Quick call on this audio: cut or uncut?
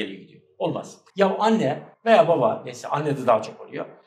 cut